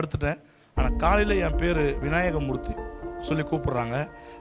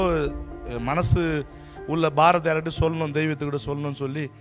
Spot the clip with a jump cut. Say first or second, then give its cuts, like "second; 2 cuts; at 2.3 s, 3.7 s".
first; 1 cut; at 3.1 s